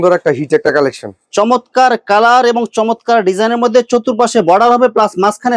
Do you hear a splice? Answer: no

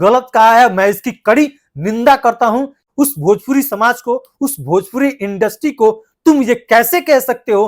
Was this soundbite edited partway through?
yes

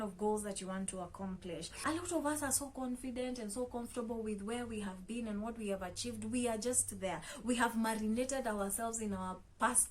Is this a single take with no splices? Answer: no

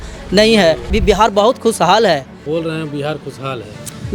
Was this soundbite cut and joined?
yes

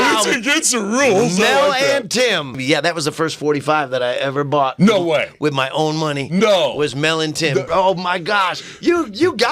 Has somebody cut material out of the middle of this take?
yes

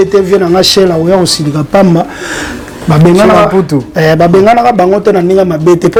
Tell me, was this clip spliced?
no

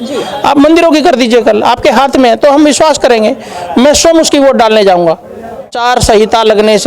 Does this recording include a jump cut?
yes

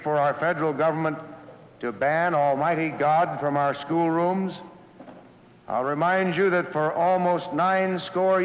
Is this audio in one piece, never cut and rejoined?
yes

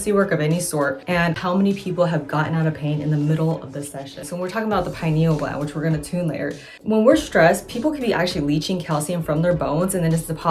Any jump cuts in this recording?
yes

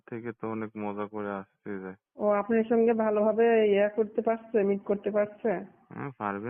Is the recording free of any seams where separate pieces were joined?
no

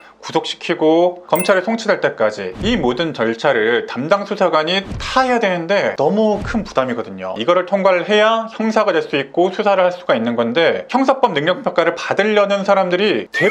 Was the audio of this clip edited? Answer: yes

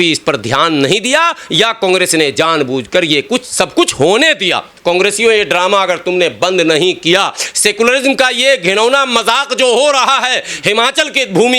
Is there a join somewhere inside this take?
yes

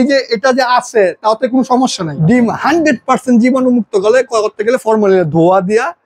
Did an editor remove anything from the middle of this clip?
yes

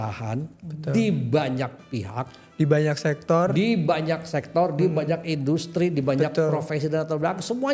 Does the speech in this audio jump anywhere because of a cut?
no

